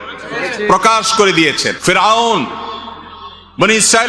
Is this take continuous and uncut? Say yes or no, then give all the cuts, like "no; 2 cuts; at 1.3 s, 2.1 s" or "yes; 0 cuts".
no; 1 cut; at 1.7 s